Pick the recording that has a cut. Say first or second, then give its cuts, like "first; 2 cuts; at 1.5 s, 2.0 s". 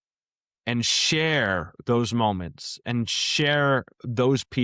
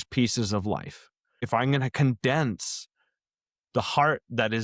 second; 1 cut; at 1.5 s